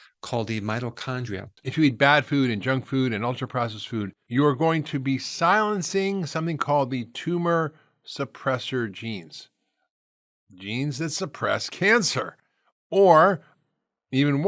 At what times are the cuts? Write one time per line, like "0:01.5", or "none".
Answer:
0:01.5